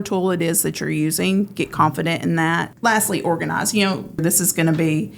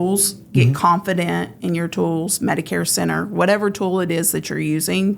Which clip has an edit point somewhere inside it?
first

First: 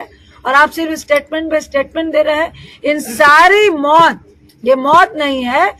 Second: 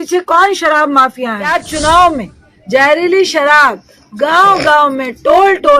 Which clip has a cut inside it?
second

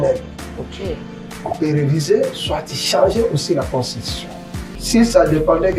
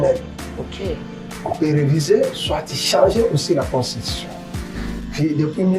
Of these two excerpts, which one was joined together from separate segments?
first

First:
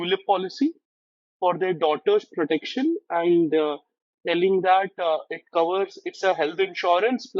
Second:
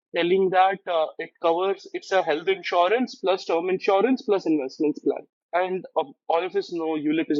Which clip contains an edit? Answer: second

